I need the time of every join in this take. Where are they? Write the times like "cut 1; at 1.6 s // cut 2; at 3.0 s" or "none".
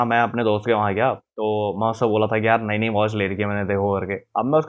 none